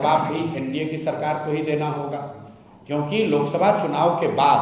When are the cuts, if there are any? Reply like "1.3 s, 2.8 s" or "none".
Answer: none